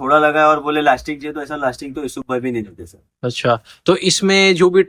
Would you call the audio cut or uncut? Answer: uncut